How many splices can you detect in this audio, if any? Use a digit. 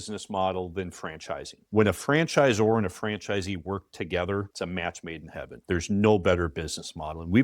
1